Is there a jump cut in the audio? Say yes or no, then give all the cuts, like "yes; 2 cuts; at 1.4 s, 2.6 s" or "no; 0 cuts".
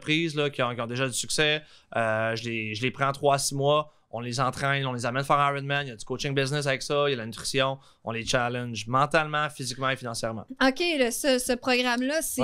no; 0 cuts